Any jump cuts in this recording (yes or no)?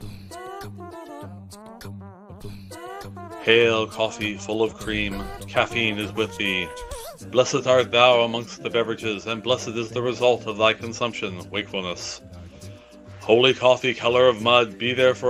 no